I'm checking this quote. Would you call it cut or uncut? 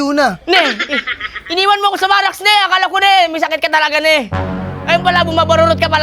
uncut